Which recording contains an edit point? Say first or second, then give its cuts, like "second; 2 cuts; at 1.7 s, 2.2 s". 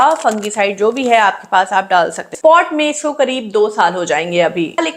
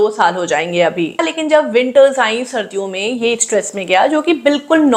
first; 1 cut; at 2.3 s